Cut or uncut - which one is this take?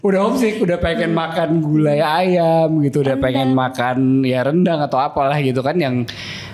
uncut